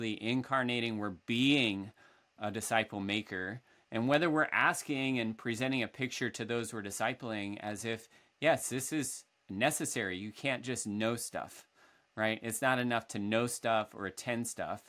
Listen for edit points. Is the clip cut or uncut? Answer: uncut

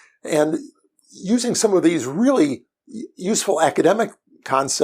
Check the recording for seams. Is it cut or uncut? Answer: uncut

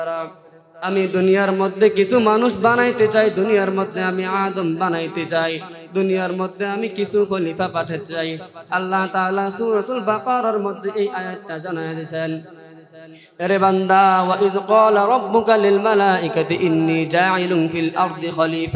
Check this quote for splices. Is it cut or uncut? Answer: uncut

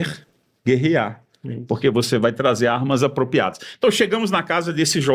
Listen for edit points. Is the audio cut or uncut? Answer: uncut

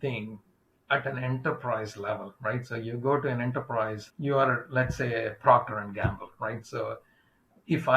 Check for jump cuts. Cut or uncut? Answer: cut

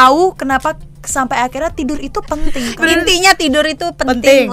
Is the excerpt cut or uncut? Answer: cut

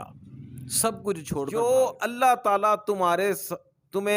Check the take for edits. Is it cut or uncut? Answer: cut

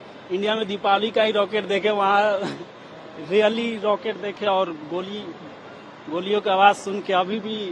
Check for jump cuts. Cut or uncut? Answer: uncut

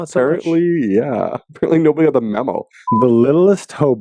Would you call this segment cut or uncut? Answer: cut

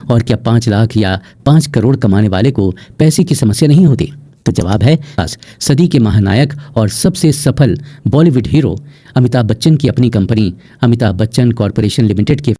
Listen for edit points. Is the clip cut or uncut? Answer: cut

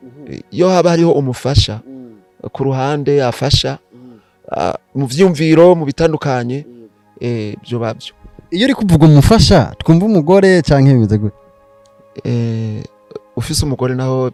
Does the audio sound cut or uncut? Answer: uncut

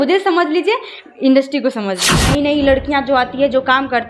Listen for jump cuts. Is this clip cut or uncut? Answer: cut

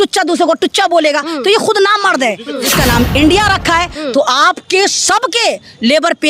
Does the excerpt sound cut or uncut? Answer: cut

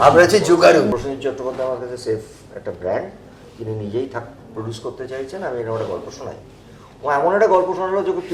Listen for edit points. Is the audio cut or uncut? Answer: cut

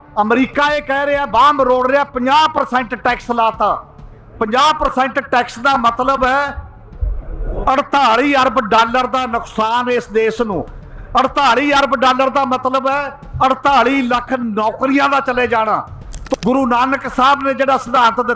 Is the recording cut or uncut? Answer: cut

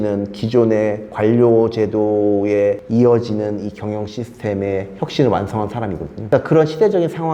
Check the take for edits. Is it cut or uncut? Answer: cut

